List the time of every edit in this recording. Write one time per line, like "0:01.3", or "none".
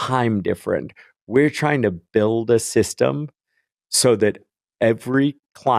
none